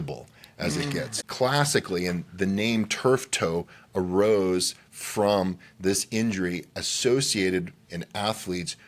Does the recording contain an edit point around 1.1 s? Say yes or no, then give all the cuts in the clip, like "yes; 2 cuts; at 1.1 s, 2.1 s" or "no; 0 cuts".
yes; 1 cut; at 1.1 s